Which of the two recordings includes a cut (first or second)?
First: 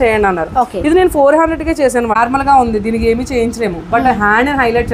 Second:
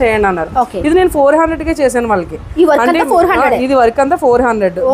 first